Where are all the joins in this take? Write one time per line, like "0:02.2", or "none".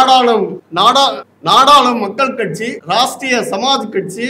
none